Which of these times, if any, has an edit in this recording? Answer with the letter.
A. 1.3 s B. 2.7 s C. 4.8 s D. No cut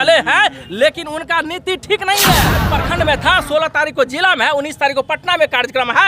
B